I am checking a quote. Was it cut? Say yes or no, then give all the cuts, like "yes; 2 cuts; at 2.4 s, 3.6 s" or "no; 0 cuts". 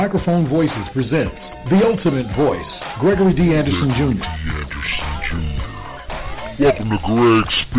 no; 0 cuts